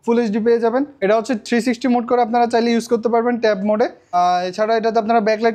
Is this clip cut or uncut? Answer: cut